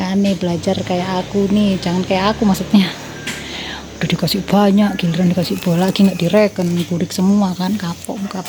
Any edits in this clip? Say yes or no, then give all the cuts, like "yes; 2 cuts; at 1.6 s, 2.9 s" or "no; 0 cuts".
no; 0 cuts